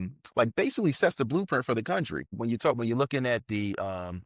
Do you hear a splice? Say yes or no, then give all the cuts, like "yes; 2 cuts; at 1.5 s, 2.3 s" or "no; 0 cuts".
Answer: yes; 1 cut; at 2.3 s